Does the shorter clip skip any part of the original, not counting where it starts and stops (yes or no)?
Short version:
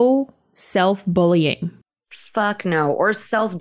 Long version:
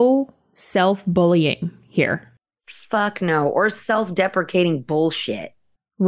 yes